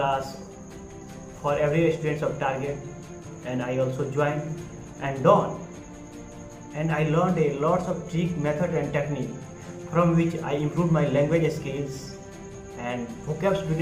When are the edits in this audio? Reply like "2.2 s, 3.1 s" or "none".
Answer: none